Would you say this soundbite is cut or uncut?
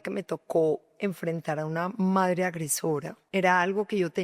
cut